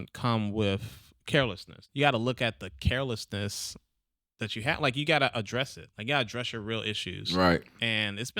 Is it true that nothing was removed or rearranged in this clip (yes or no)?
no